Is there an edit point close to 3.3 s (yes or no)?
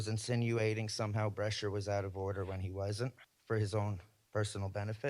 yes